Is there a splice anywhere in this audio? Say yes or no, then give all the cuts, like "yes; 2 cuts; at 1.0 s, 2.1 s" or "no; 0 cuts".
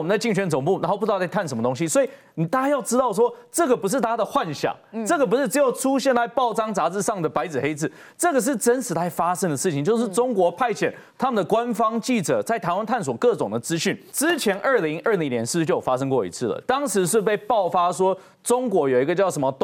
yes; 1 cut; at 14.1 s